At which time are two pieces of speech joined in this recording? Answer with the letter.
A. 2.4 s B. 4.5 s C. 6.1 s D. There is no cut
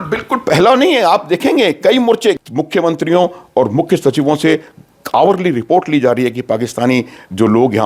A